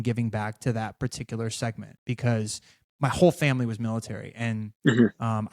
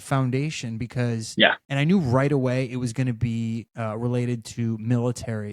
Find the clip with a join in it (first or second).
second